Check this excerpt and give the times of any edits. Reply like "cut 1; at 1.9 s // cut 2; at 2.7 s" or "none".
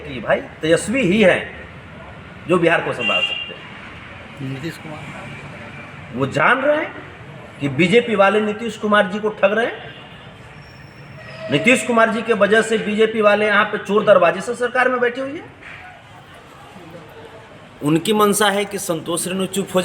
cut 1; at 4.8 s // cut 2; at 15.8 s